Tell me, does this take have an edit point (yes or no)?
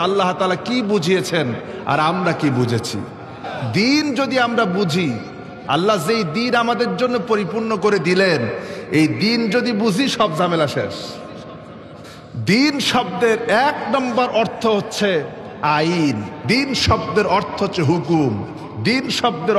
yes